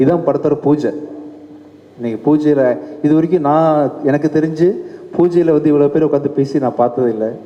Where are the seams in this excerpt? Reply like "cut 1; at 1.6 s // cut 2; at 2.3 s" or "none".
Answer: none